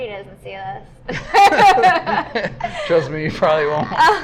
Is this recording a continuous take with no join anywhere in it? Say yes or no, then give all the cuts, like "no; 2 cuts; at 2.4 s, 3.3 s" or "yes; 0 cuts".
yes; 0 cuts